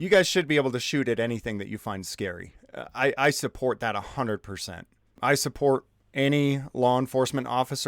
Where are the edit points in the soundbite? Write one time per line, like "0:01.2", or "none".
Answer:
0:05.0